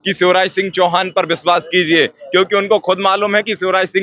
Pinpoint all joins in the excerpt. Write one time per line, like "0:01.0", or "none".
none

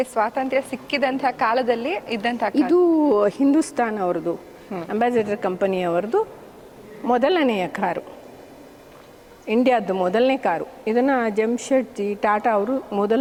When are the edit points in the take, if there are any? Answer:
none

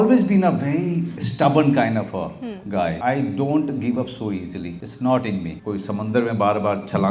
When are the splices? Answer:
0:01.2
0:03.0
0:04.8
0:05.6

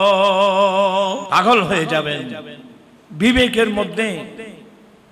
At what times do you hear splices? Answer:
0:01.2

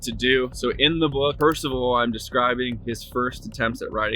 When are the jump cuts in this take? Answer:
0:01.4

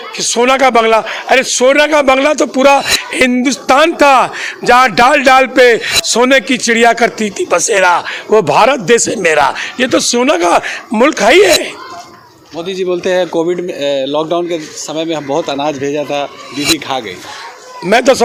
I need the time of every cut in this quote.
none

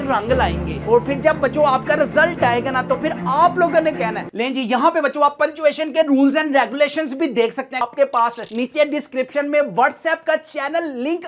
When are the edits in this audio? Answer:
0:04.3
0:07.8

